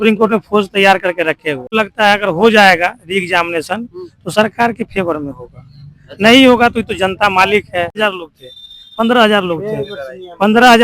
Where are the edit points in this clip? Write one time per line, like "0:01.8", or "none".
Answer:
0:01.7
0:08.0